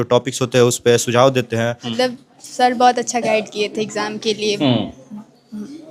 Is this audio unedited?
no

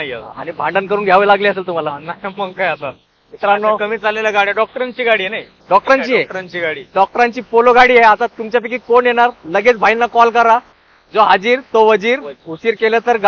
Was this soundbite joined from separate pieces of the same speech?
no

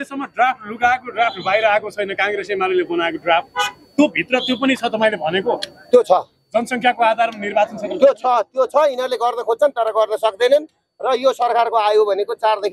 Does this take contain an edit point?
no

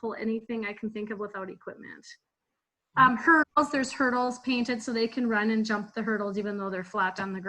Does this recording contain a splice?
no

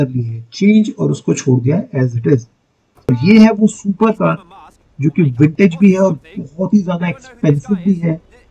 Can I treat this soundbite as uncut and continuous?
no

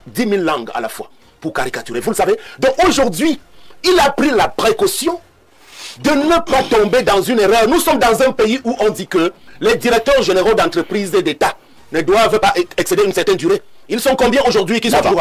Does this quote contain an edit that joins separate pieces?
no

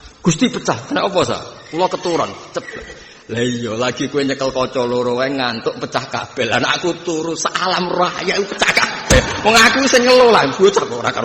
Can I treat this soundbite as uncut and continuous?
yes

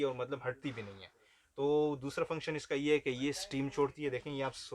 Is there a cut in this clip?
no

